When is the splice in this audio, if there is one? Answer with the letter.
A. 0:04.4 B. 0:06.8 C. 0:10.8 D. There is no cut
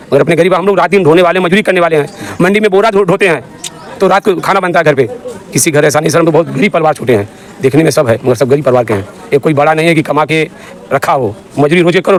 D